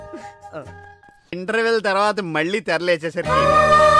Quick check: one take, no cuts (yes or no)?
no